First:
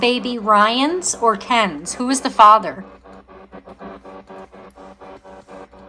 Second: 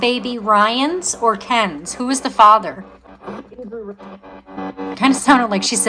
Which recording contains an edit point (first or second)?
second